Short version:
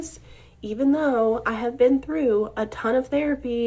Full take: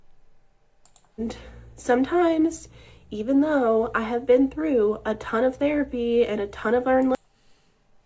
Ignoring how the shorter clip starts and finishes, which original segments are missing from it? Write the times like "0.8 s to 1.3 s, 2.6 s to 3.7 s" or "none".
none

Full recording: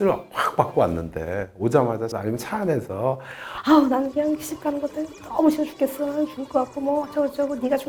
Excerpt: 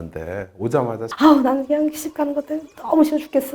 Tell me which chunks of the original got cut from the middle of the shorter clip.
2.1 s to 3.5 s

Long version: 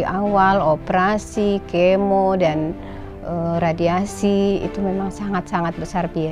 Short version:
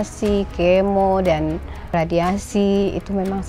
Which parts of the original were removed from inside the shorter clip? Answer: 3.1 s to 3.6 s

